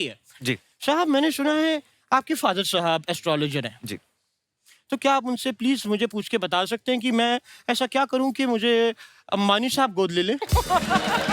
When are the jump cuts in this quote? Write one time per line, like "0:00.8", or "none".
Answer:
none